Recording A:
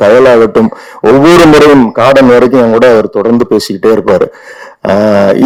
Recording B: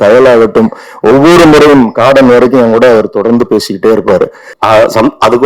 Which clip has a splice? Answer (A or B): B